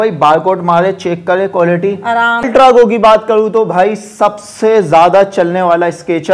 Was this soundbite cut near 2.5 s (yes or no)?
yes